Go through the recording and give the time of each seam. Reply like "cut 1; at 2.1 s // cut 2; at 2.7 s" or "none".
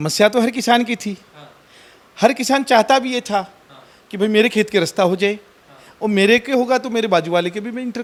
none